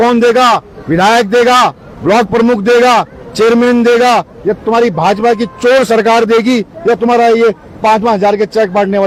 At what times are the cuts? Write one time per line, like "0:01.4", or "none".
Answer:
none